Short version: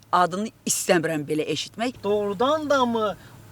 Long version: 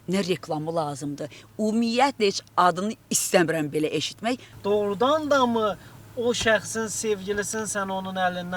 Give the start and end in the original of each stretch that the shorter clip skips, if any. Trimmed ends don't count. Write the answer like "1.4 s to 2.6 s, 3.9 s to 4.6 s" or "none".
4.4 s to 4.6 s

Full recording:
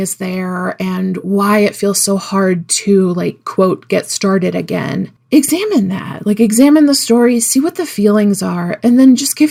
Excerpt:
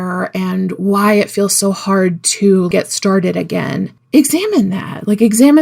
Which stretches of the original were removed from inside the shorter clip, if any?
3.1 s to 3.9 s

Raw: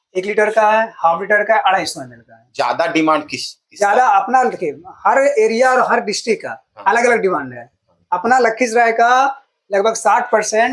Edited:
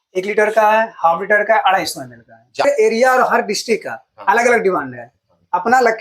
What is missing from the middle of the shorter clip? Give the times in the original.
2.6 s to 5.2 s

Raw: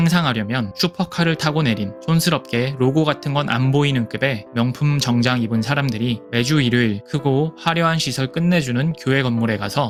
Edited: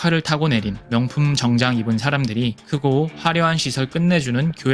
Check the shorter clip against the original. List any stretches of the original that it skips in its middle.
1.9 s to 4.4 s, 6.3 s to 7.0 s

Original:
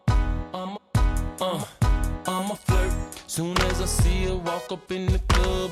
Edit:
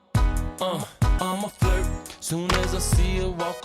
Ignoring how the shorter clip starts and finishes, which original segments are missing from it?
1.9 s to 2.2 s

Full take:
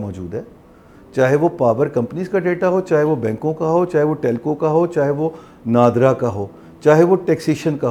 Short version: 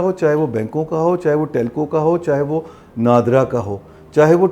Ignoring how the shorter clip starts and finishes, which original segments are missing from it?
none

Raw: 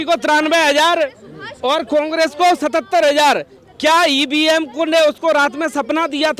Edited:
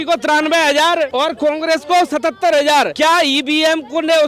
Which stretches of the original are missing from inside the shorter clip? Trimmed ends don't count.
1.1 s to 1.6 s, 3.4 s to 3.8 s

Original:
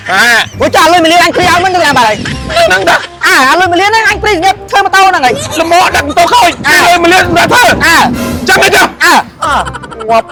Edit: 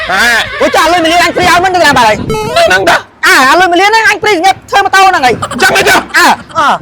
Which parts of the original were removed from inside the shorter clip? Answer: 5.5 s to 8.3 s

